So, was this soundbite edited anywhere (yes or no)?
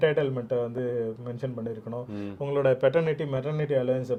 no